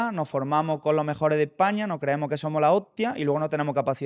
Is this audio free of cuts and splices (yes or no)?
yes